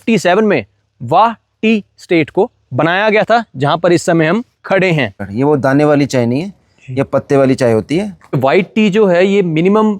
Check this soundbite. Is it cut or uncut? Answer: cut